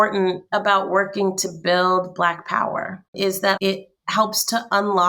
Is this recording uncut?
no; 1 cut; at 3.6 s

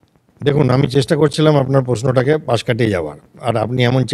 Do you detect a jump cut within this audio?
no; 0 cuts

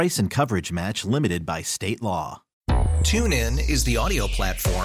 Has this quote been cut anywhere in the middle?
yes; 1 cut; at 2.4 s

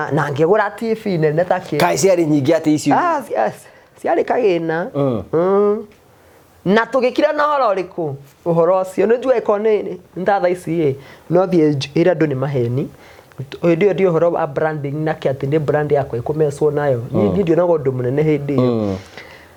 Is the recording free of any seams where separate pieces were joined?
yes; 0 cuts

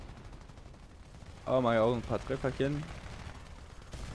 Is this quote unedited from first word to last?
no; 1 cut; at 1.0 s

